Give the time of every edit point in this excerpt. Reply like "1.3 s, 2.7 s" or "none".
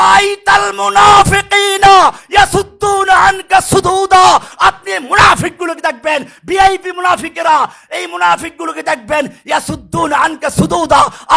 none